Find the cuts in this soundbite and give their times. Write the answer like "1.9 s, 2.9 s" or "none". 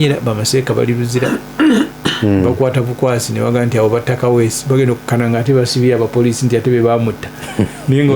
none

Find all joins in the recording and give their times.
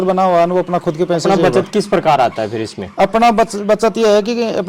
1.2 s

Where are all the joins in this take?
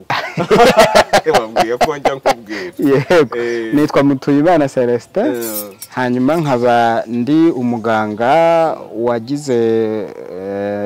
none

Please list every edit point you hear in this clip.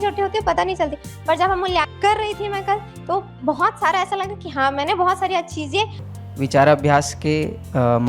6.0 s

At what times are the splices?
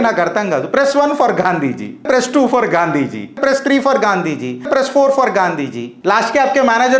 2.1 s, 3.4 s, 4.7 s, 5.8 s

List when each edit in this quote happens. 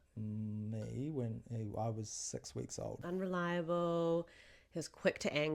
3.0 s

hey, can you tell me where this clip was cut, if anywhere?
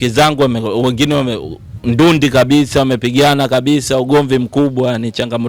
none

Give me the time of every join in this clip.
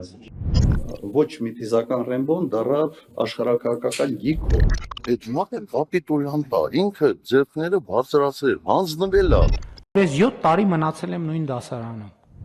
none

